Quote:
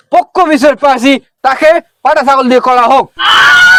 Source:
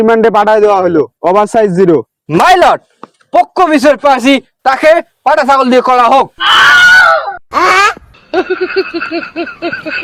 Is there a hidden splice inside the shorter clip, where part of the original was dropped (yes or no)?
no